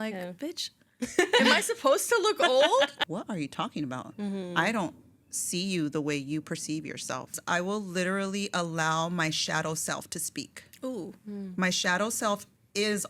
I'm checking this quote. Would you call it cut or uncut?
cut